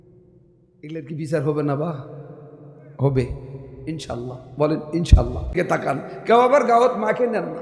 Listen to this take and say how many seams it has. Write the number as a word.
one